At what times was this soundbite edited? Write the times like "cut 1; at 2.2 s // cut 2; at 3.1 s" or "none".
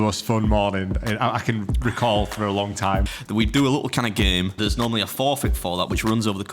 cut 1; at 3.1 s // cut 2; at 4.6 s